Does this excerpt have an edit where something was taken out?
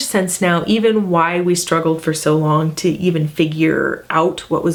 no; 0 cuts

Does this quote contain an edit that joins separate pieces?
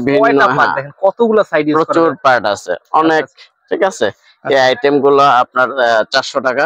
no; 0 cuts

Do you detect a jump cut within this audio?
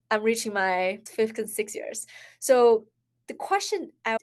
yes; 1 cut; at 1.0 s

